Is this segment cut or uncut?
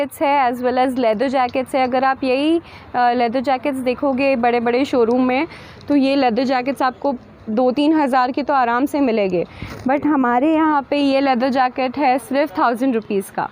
uncut